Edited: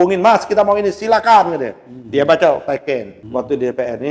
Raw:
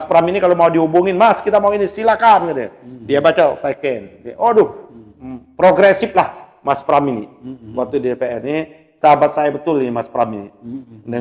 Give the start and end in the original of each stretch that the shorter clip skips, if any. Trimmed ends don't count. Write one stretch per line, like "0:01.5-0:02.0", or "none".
0:04.1-0:07.6